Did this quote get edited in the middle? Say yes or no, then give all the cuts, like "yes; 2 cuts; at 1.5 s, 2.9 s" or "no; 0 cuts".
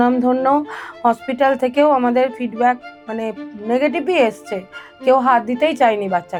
no; 0 cuts